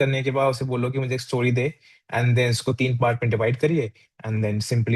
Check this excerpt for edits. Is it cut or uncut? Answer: uncut